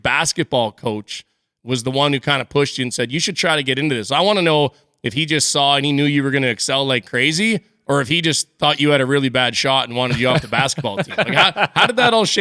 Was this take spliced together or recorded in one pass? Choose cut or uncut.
uncut